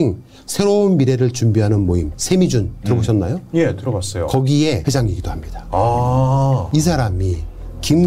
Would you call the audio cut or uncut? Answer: cut